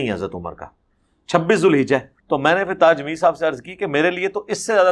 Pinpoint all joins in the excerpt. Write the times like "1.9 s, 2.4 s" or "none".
2.1 s